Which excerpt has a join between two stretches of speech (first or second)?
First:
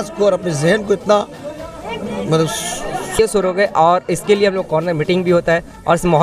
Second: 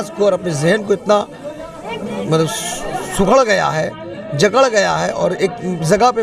first